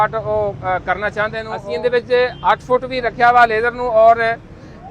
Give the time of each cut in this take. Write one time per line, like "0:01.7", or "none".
0:01.5